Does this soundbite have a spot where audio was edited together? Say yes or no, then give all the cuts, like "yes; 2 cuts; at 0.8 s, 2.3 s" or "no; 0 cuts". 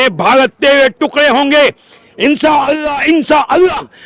no; 0 cuts